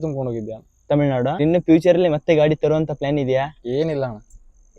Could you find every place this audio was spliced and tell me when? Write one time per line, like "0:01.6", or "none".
0:01.4